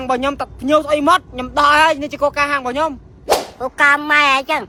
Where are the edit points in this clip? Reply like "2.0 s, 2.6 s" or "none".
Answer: none